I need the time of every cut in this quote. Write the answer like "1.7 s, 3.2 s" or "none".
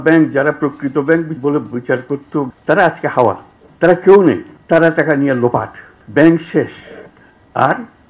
1.3 s, 2.5 s